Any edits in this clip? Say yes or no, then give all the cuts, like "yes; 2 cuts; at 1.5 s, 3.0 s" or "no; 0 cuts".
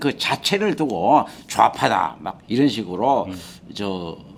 no; 0 cuts